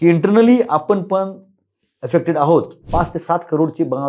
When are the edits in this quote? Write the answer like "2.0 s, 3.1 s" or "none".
2.8 s